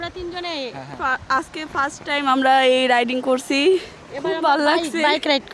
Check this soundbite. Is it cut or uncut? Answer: uncut